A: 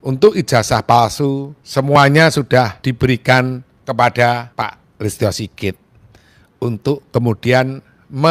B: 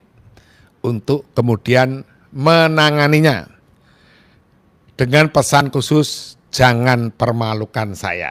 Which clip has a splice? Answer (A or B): A